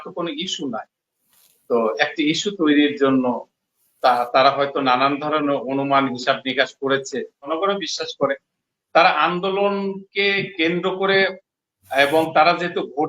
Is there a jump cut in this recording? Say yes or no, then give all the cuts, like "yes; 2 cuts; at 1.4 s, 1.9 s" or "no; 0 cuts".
yes; 1 cut; at 7.5 s